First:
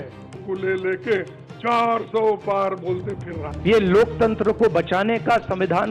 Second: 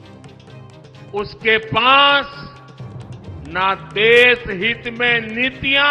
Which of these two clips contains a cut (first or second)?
second